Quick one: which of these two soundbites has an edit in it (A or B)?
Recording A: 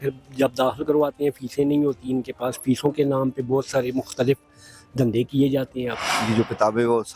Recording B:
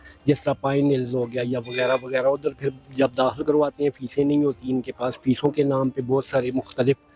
A